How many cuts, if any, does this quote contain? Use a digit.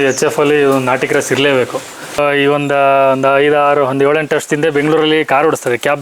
1